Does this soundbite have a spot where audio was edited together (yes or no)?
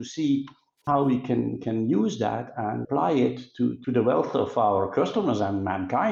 no